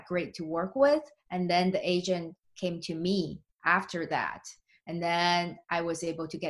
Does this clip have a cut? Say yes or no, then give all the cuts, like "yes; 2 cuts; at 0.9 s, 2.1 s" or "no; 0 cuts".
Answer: no; 0 cuts